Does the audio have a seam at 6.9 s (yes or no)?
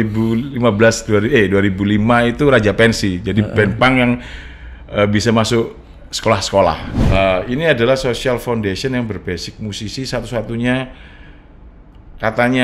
yes